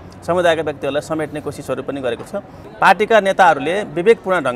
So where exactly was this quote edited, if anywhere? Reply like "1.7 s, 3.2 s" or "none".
2.6 s